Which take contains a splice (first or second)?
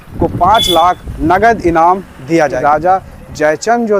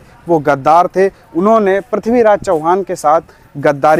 first